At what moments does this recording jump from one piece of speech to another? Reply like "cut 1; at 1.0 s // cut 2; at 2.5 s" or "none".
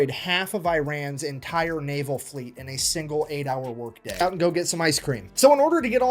cut 1; at 4.0 s